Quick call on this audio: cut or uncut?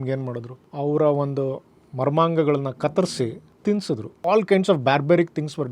cut